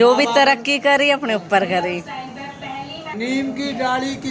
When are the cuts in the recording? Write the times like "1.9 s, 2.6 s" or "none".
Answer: 3.1 s